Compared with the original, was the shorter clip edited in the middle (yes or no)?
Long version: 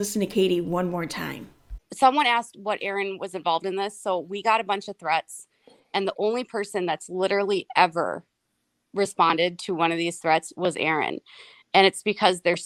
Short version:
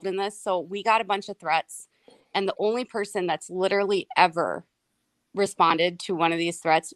no